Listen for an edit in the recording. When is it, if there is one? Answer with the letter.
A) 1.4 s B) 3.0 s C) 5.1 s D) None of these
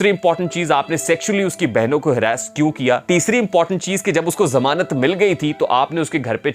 B